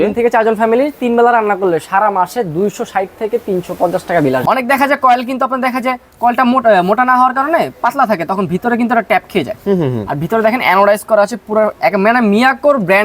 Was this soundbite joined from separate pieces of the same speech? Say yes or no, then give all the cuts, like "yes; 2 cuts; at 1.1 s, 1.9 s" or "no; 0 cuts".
yes; 1 cut; at 4.4 s